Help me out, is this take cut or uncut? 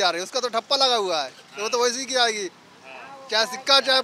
uncut